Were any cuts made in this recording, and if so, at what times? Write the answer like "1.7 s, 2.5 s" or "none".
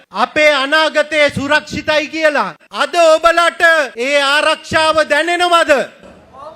2.7 s